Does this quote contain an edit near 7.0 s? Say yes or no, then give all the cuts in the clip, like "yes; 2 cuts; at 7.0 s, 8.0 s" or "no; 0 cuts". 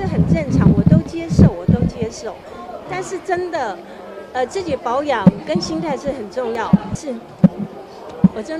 yes; 1 cut; at 7.0 s